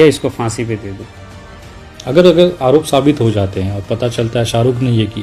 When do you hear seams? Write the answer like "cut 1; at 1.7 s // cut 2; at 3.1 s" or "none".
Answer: none